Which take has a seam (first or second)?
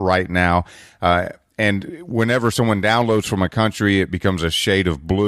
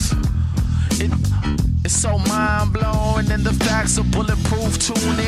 first